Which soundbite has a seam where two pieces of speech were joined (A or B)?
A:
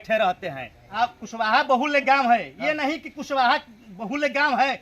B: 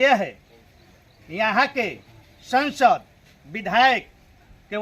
A